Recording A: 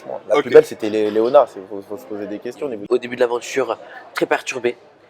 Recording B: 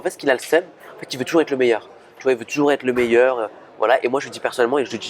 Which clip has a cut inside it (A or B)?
A